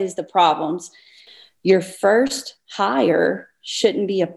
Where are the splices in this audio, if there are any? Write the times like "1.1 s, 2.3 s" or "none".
1.2 s